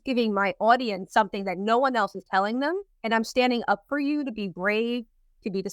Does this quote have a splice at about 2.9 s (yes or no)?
yes